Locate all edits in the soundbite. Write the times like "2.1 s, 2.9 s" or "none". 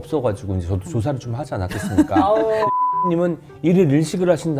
none